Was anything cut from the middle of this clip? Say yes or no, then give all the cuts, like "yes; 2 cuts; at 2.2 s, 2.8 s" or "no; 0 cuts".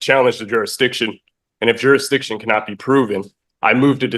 no; 0 cuts